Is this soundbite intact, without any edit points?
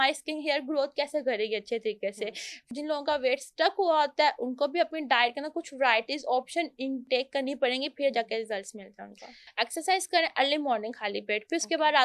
no; 2 cuts; at 2.7 s, 9.4 s

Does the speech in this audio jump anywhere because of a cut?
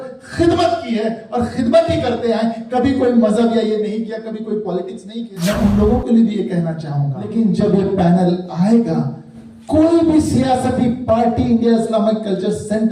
yes; 2 cuts; at 5.3 s, 7.3 s

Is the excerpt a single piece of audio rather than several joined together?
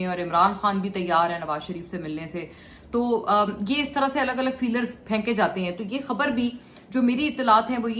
yes; 0 cuts

